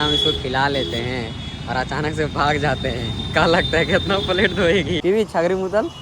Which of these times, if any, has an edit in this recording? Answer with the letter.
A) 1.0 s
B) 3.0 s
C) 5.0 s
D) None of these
C